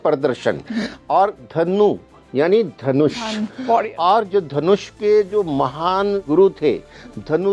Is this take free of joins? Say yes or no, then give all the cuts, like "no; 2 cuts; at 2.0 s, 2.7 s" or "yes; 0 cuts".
no; 1 cut; at 6.2 s